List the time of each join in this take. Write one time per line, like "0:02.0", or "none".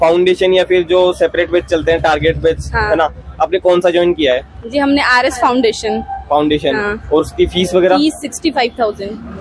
none